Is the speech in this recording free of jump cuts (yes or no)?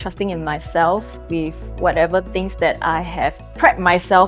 yes